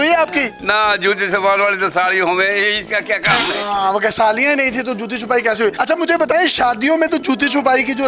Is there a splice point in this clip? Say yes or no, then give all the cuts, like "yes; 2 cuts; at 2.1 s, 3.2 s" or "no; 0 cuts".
no; 0 cuts